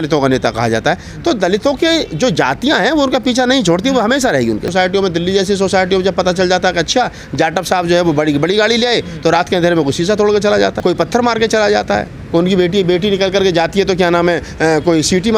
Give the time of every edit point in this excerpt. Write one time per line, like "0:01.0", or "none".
0:04.7
0:10.8